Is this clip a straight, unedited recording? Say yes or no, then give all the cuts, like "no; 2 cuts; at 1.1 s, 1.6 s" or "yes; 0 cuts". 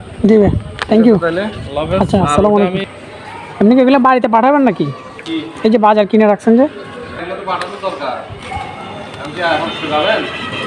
yes; 0 cuts